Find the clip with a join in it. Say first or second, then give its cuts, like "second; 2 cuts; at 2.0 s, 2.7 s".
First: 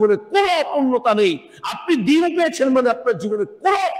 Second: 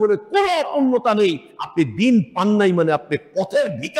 second; 1 cut; at 1.5 s